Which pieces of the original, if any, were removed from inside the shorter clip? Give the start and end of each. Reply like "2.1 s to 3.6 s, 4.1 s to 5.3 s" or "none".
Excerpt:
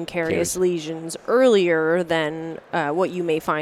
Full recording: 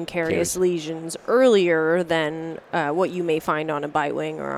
none

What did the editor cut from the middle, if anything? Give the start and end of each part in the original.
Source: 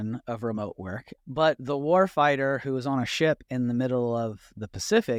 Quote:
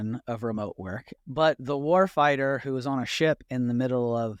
none

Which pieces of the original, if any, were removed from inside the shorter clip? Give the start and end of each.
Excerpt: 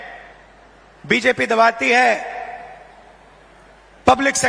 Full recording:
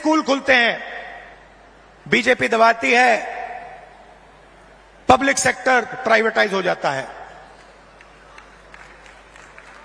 none

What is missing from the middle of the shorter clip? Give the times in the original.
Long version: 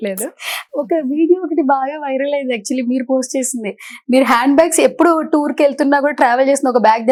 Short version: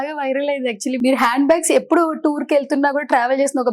2.8 s to 4.0 s

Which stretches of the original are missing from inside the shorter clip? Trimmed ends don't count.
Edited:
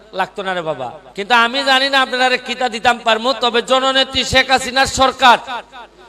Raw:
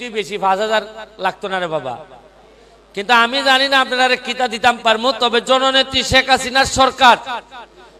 2.1 s to 2.8 s

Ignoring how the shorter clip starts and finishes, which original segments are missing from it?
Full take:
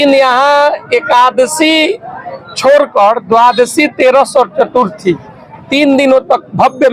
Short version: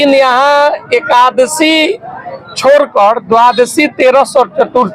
none

